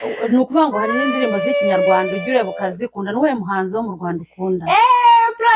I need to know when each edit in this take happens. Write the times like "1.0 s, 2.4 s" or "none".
none